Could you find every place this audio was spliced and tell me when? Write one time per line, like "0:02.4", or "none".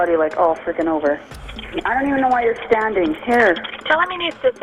0:01.2